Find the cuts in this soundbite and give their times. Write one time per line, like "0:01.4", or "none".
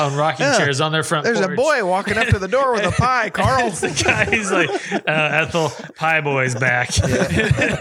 none